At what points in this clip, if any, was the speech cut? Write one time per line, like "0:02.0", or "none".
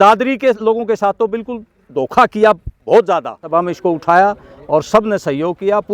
0:03.4